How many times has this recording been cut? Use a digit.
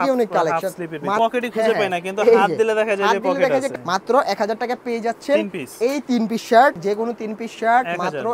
3